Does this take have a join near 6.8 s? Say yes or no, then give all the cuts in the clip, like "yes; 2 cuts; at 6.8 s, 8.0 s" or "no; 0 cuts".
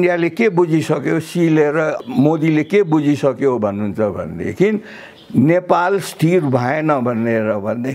no; 1 cut; at 2.0 s